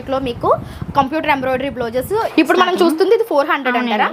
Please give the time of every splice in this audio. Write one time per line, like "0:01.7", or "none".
0:02.3